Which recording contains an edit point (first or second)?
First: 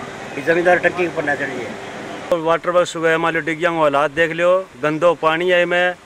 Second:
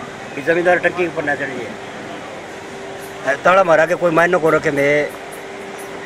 first